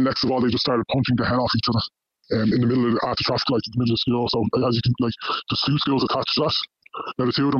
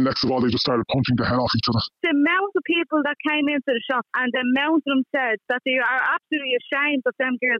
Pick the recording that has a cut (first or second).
second